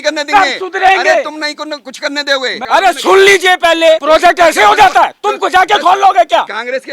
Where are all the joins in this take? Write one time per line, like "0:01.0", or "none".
0:02.6
0:04.0